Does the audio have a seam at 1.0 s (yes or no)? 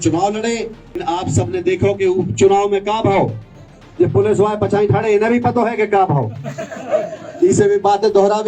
yes